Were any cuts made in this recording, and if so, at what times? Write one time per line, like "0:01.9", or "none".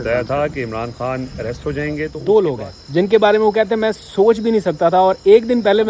0:02.2